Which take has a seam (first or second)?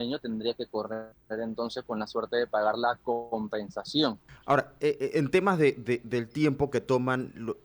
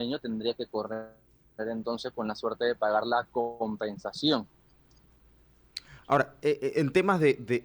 first